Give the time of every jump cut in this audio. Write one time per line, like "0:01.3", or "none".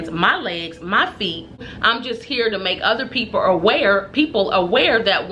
0:01.7